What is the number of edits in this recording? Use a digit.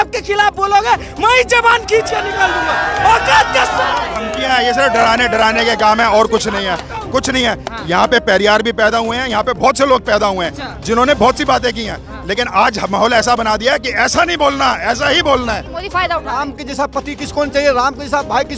1